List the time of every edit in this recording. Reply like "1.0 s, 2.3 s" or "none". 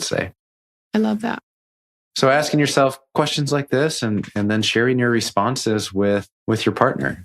6.3 s